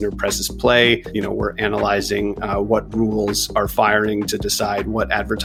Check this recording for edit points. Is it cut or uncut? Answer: uncut